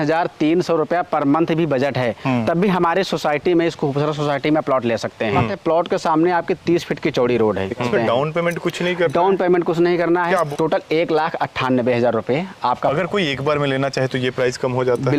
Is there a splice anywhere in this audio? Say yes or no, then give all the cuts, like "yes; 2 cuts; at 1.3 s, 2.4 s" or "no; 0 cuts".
yes; 4 cuts; at 5.5 s, 7.9 s, 10.5 s, 12.9 s